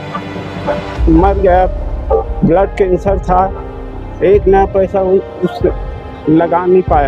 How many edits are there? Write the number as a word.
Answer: zero